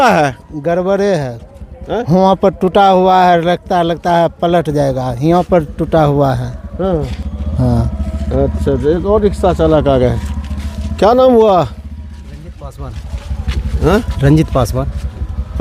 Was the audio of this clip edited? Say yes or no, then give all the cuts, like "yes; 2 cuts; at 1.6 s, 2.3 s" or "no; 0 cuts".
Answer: no; 0 cuts